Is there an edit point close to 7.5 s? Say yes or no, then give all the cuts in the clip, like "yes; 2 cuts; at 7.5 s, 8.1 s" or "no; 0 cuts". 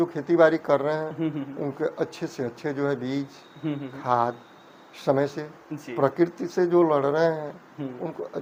no; 0 cuts